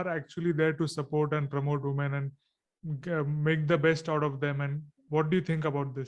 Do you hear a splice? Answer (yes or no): yes